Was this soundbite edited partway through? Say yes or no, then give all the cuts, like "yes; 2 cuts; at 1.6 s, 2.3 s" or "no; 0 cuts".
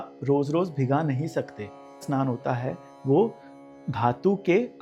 yes; 1 cut; at 2.1 s